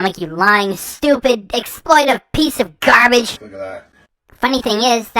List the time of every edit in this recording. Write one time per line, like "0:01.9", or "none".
0:03.5